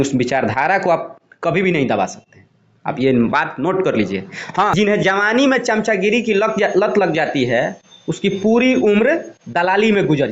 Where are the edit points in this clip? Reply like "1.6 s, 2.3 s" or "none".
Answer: 4.7 s